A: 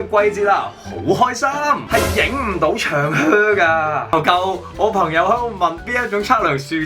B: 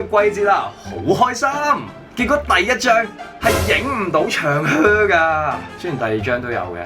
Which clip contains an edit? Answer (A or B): A